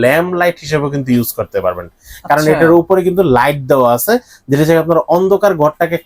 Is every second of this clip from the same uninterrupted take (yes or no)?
yes